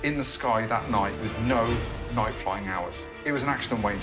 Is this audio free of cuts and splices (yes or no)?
no